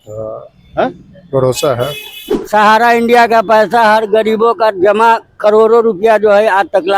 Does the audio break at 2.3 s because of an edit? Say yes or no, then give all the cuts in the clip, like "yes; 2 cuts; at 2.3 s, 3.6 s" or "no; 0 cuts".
yes; 1 cut; at 2.3 s